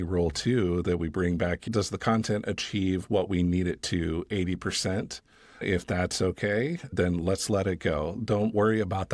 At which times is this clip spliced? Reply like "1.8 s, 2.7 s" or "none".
1.6 s